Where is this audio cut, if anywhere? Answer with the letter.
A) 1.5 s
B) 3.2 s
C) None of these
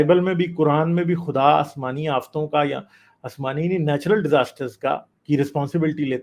C